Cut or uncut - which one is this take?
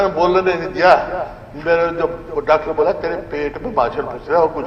uncut